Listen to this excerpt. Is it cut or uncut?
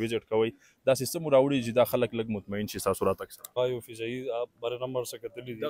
cut